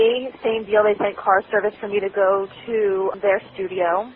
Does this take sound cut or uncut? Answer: uncut